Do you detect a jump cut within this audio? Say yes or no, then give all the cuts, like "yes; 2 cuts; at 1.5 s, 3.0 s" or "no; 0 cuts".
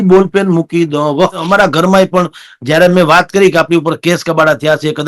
yes; 1 cut; at 1.4 s